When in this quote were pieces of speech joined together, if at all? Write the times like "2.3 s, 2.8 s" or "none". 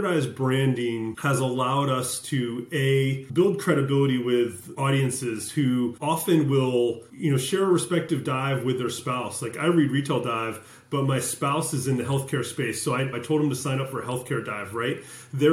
1.2 s, 3.2 s, 4.7 s, 6.0 s, 7.1 s, 13.2 s

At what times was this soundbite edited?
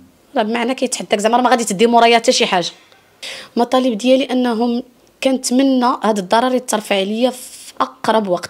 none

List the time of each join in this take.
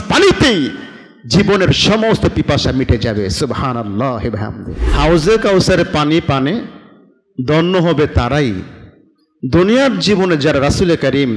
4.8 s

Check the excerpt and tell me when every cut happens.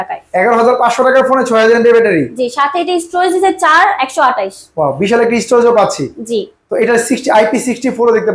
none

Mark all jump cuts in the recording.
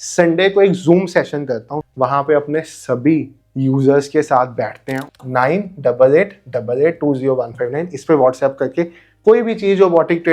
1.8 s, 5.1 s

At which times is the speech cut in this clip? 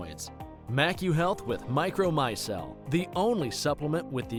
none

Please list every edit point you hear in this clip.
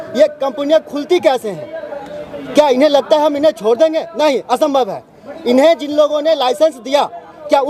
none

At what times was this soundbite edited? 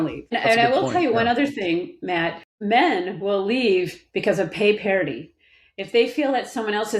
2.5 s

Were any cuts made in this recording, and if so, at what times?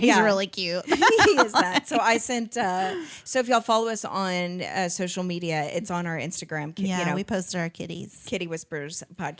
none

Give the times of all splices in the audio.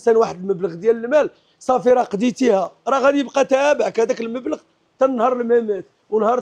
none

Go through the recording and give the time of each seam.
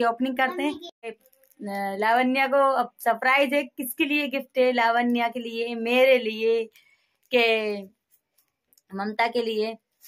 1.0 s

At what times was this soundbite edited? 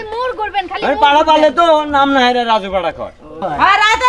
2.9 s

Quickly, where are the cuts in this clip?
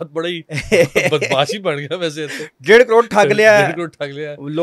none

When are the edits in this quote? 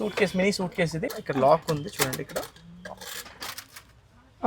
1.0 s

